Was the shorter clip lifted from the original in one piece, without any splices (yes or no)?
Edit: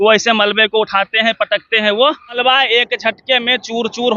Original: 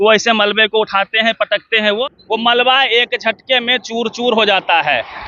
no